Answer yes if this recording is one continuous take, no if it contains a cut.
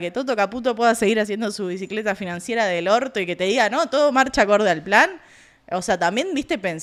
yes